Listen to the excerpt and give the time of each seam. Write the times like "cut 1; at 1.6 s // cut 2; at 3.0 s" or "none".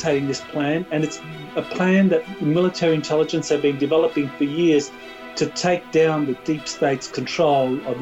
none